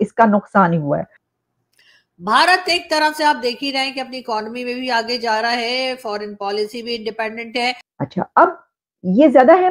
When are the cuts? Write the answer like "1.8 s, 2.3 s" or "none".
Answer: 1.4 s, 7.9 s